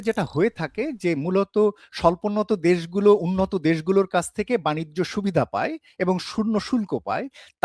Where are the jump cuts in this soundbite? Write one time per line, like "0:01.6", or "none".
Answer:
none